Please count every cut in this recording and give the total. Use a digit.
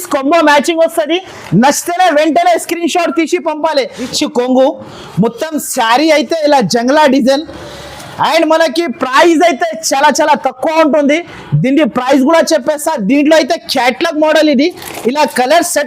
1